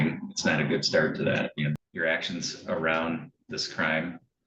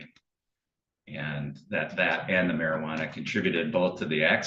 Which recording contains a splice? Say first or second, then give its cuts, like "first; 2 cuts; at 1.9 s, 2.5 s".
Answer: first; 1 cut; at 1.8 s